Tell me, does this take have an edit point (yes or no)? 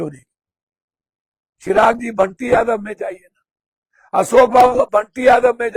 no